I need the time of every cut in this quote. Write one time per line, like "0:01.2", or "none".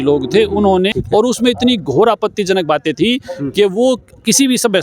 0:00.9